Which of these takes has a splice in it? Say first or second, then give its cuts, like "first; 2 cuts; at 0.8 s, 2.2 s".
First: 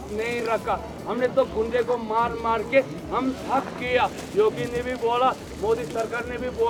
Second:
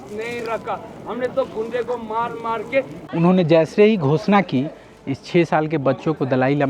second; 1 cut; at 3.0 s